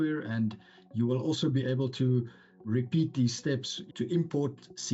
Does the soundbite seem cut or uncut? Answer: cut